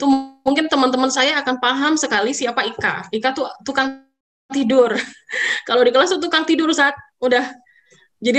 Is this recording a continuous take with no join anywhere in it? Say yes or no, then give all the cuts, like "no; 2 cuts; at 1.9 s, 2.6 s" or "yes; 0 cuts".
yes; 0 cuts